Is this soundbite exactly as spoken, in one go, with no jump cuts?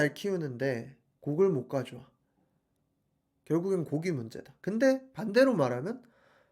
yes; 0 cuts

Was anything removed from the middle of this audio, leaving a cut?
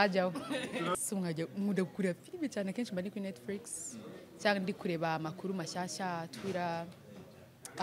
yes; 1 cut; at 1.0 s

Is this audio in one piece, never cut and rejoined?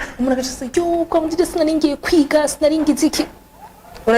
yes; 0 cuts

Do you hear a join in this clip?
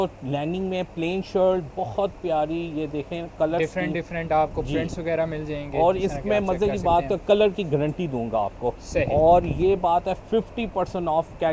no; 0 cuts

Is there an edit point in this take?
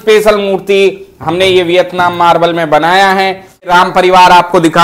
yes; 1 cut; at 3.7 s

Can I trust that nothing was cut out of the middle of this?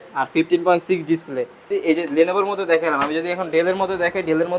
no; 1 cut; at 1.6 s

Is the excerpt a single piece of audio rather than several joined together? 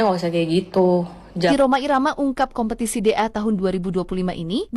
no; 1 cut; at 1.5 s

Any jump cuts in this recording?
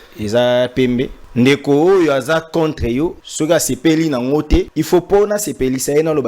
yes; 3 cuts; at 1.2 s, 3.2 s, 4.8 s

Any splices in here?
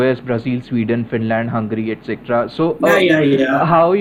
no; 0 cuts

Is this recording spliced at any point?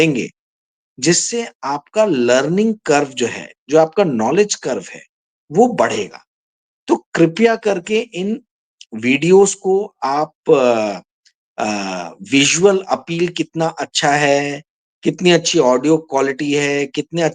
no; 0 cuts

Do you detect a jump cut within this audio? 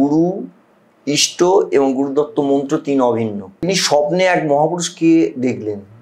yes; 1 cut; at 3.7 s

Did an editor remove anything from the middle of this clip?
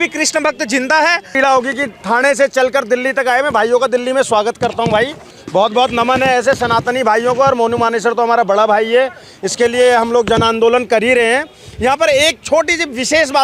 yes; 1 cut; at 1.3 s

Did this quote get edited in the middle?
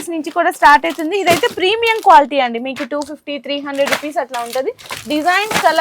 no; 0 cuts

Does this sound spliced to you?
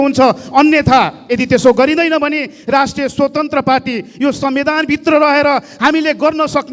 no; 0 cuts

